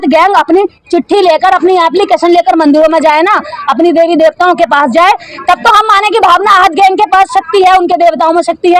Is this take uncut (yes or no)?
yes